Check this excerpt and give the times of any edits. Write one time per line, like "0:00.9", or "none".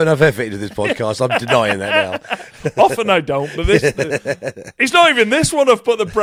none